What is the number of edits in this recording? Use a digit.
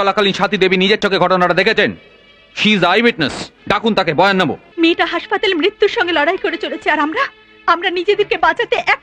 1